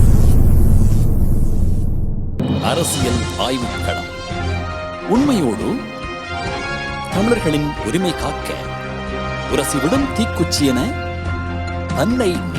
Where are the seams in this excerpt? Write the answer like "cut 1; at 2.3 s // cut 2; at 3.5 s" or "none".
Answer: cut 1; at 2.4 s